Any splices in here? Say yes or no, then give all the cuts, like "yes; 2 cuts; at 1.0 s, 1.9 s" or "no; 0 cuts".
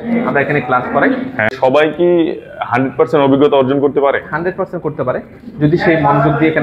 yes; 1 cut; at 1.5 s